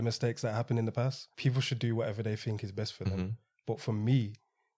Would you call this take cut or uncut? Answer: cut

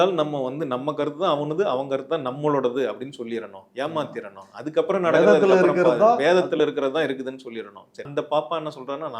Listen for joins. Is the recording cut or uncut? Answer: cut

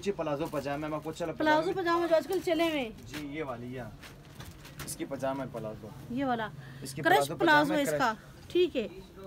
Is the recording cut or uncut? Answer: uncut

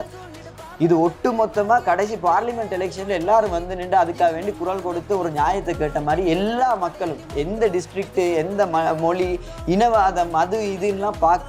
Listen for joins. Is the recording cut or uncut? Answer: uncut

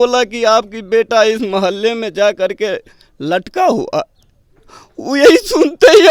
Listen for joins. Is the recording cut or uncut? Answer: uncut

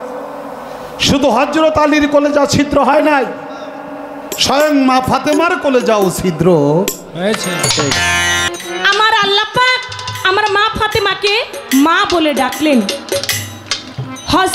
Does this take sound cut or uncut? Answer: cut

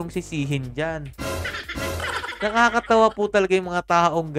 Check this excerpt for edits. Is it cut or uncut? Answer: uncut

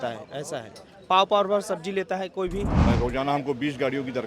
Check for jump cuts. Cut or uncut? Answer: cut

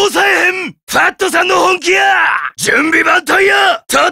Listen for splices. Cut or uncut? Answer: uncut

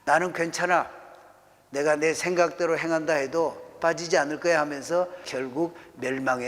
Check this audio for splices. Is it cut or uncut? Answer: cut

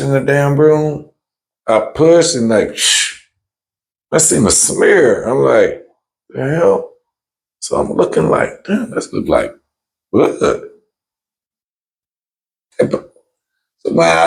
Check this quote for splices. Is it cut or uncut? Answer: uncut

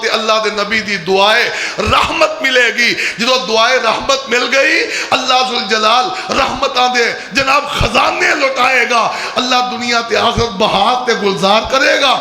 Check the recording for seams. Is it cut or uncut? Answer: uncut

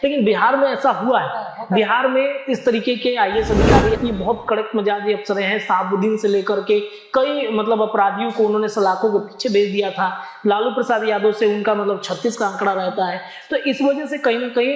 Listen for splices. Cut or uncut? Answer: cut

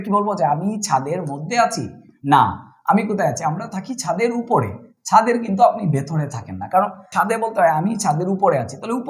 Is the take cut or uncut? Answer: cut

